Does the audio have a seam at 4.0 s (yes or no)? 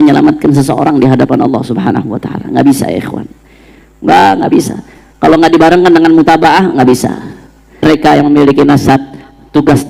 no